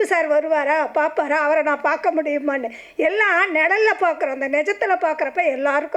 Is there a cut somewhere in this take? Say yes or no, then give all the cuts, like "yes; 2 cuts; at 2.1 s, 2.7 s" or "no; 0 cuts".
no; 0 cuts